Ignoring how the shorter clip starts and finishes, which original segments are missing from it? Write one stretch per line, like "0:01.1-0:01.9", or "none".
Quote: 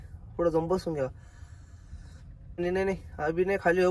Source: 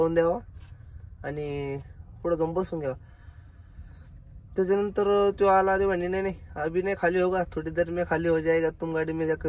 0:04.5-0:06.0